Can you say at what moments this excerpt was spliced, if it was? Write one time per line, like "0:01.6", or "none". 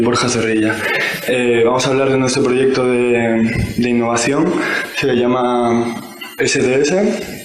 none